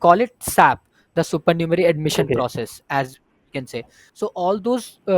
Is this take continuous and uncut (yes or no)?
no